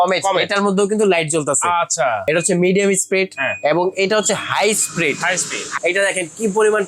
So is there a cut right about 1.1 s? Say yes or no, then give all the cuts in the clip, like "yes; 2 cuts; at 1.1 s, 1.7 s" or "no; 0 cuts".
no; 2 cuts; at 2.3 s, 5.7 s